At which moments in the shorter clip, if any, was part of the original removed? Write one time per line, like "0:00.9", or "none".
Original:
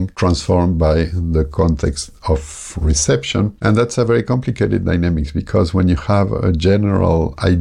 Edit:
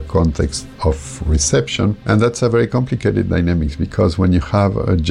0:01.1